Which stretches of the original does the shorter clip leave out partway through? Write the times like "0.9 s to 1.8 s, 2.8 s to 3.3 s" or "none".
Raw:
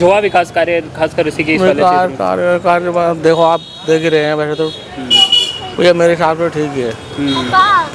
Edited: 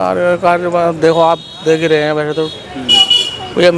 none